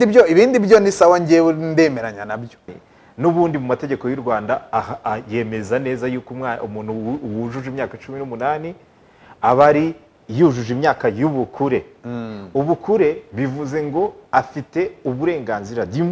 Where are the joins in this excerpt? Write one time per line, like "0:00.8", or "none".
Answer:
0:02.8

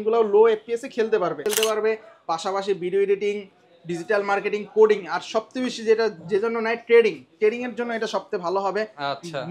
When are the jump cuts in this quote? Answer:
0:01.5

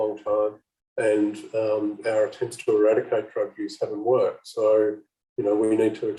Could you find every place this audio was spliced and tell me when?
none

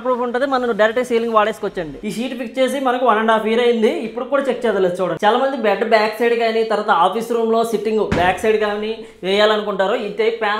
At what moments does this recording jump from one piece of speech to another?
0:01.9

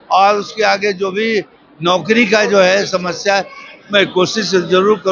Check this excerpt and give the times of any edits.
none

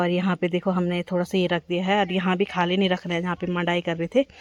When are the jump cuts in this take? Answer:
none

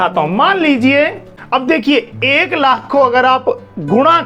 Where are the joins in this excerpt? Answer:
0:01.8

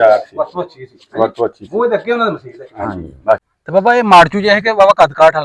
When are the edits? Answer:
0:03.5

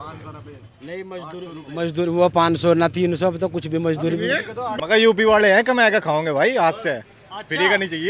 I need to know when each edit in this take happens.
0:04.7

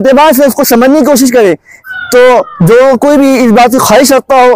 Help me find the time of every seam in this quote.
0:02.0

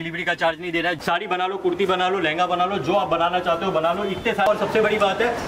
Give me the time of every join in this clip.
0:01.0
0:04.5

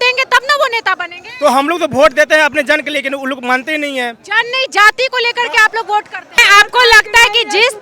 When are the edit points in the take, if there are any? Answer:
0:06.2

